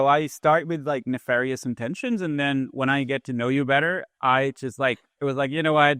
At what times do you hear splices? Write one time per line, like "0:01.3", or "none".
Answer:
none